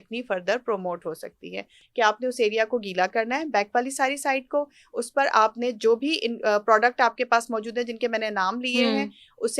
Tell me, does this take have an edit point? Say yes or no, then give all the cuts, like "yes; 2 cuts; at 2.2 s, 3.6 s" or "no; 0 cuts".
yes; 1 cut; at 1.8 s